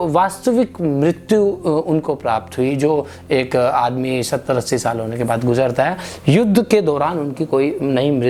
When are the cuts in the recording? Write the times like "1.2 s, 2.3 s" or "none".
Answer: none